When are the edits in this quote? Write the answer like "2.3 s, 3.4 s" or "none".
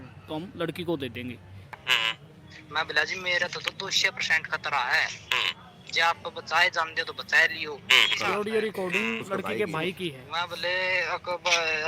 1.8 s, 8.1 s

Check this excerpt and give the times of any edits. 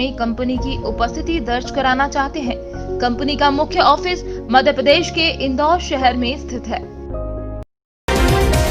7.7 s

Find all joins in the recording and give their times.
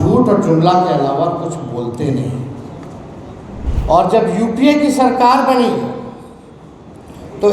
3.7 s

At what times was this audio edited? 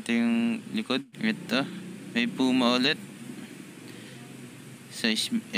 1.1 s

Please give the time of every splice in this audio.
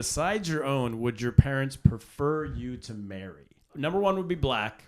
3.7 s

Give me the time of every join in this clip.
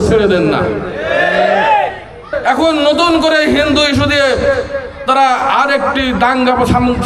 2.3 s

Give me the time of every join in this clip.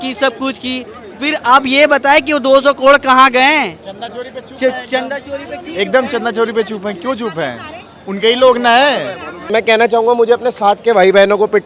9.4 s

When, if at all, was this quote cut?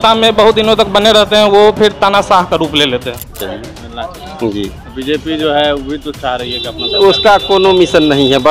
3.4 s

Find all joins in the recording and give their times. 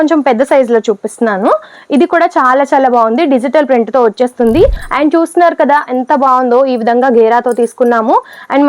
4.8 s

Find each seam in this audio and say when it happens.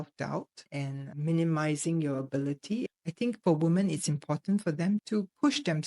3.0 s

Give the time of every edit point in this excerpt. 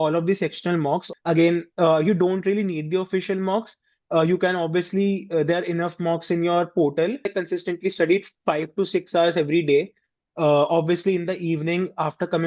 1.1 s, 7.3 s

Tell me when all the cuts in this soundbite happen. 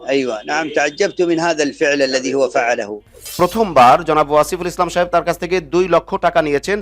3.3 s

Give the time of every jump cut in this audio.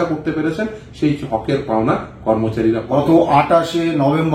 2.8 s

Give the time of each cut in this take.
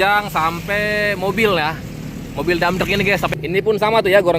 3.3 s

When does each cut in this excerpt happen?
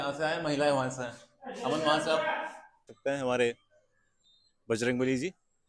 2.9 s

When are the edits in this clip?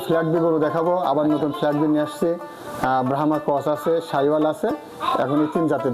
none

